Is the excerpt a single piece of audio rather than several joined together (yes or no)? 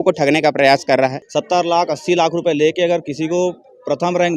no